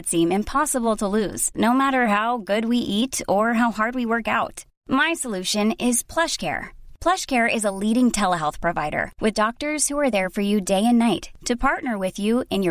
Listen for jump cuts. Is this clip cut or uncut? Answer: uncut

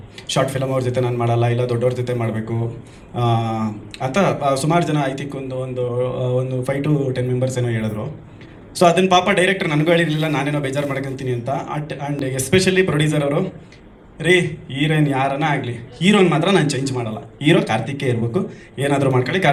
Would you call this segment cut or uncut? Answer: uncut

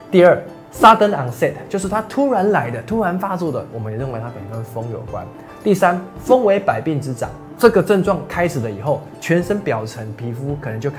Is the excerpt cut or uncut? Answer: uncut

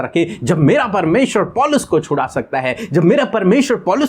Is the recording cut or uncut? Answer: uncut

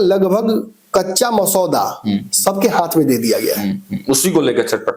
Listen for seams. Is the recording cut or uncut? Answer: uncut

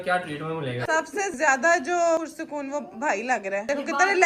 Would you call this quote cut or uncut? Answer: cut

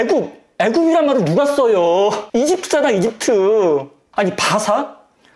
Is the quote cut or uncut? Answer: cut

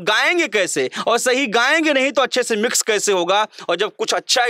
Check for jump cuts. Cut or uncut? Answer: uncut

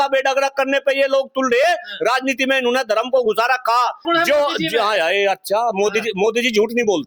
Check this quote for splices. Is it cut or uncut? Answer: cut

